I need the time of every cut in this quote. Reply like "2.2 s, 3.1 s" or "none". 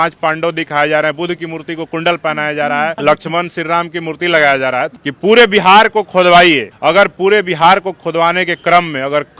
3.0 s, 5.0 s, 6.7 s